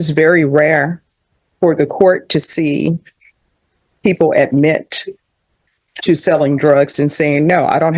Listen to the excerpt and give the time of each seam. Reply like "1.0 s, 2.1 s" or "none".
none